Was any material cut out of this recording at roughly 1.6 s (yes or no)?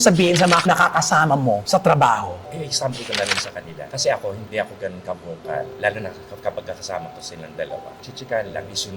no